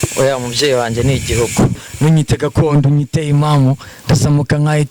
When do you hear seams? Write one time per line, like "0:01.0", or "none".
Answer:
0:01.8